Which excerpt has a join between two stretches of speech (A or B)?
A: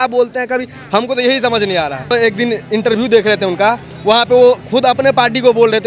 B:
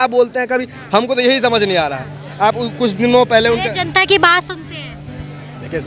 A